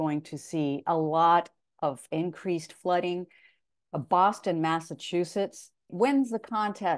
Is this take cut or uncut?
cut